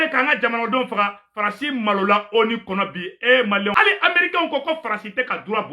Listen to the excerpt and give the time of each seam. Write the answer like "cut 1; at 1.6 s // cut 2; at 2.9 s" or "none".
cut 1; at 3.7 s